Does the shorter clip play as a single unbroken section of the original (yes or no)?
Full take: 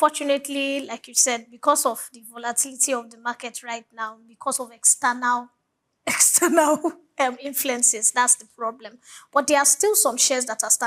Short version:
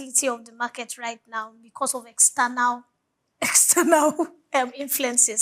yes